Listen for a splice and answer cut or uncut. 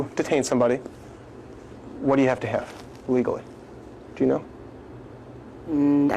uncut